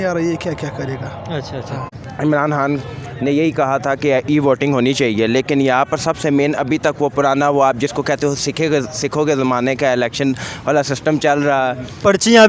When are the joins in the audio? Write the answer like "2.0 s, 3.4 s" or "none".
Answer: 1.8 s